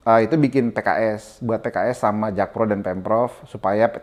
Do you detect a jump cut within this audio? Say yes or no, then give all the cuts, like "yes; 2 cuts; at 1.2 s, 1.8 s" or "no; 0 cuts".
no; 0 cuts